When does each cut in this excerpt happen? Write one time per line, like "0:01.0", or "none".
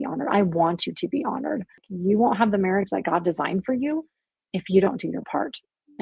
0:01.9

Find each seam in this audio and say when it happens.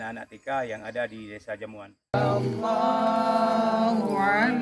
0:02.1

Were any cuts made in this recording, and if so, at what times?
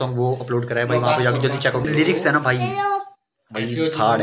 0:01.9

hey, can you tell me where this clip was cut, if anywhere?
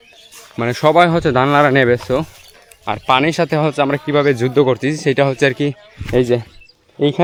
none

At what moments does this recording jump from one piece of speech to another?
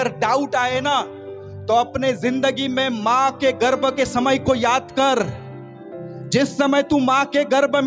none

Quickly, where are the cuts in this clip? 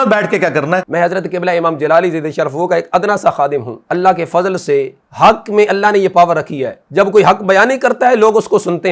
none

